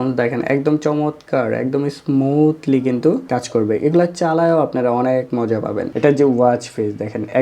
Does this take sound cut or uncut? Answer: cut